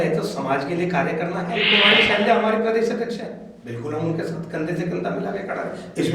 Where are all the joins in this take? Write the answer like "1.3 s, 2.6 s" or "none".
1.6 s